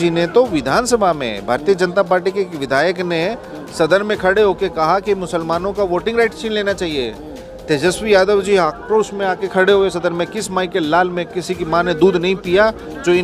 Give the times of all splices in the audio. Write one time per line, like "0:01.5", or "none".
none